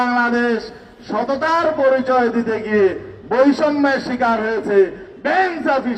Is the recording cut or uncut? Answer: uncut